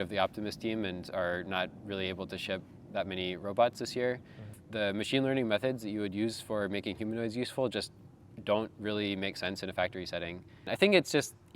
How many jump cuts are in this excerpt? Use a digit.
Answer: 2